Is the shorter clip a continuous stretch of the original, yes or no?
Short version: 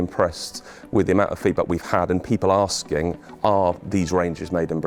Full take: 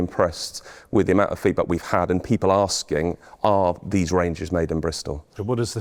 yes